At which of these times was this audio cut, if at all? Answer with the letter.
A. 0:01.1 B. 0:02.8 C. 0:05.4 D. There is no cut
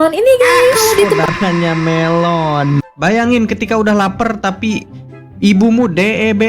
B